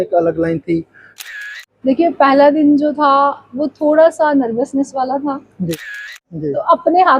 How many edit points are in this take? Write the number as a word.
two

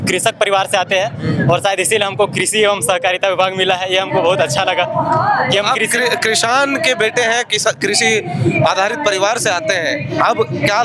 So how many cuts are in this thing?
zero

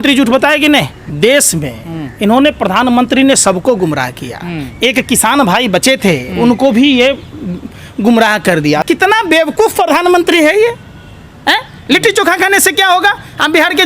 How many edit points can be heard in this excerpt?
two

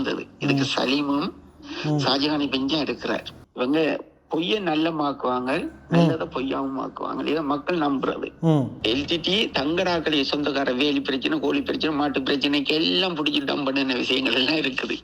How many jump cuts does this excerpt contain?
two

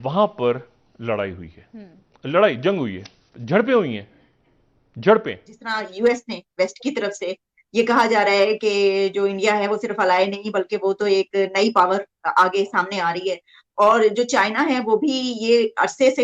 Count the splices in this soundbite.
one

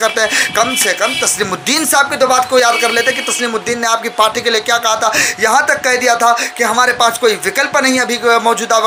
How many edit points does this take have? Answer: zero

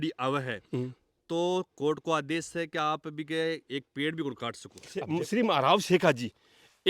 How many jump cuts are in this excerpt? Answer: one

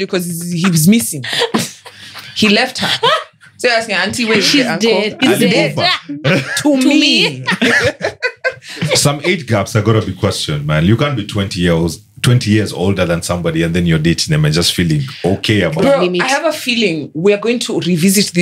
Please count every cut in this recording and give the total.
two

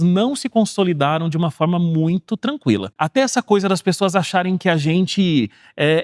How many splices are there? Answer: one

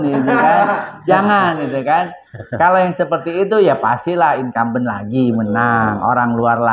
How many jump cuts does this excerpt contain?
zero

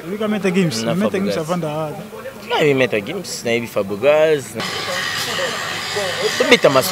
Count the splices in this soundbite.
one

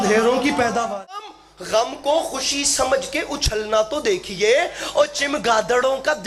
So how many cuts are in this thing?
one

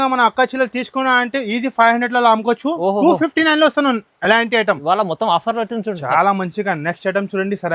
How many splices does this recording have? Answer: zero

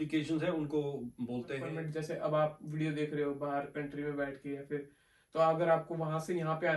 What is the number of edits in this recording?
one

